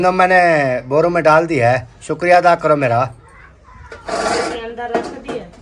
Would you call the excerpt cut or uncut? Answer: uncut